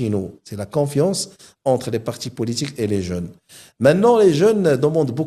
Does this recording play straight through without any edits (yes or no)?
yes